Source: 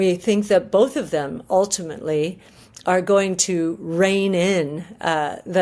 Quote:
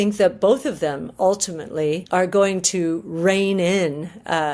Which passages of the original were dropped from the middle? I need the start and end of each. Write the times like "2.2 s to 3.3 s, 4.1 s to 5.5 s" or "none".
2.3 s to 2.8 s